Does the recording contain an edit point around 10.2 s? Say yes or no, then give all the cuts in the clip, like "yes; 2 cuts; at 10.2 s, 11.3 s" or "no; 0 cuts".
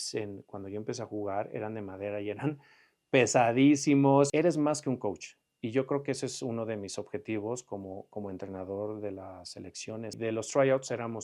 yes; 2 cuts; at 4.3 s, 10.2 s